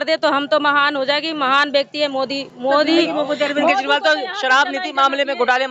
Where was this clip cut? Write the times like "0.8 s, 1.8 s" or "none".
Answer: none